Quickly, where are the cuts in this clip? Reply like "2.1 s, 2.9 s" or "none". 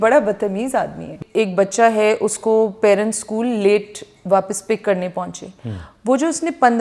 1.2 s